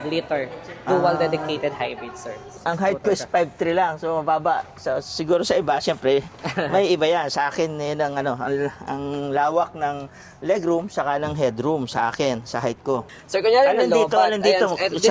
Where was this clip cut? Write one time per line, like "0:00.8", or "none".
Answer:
0:02.6
0:13.1